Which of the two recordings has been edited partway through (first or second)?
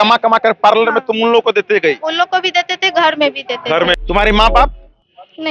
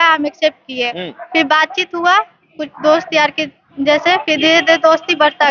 first